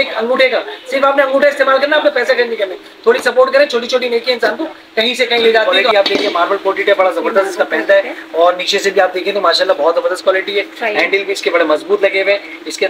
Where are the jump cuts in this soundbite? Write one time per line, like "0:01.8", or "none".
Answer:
0:05.8